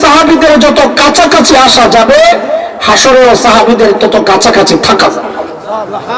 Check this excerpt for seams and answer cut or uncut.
uncut